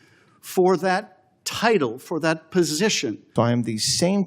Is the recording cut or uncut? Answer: cut